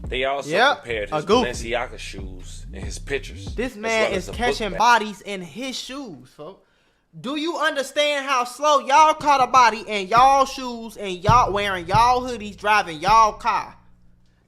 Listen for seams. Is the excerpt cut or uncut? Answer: uncut